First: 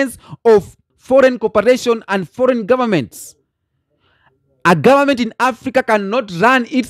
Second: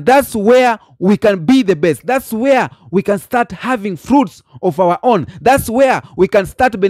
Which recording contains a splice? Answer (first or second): first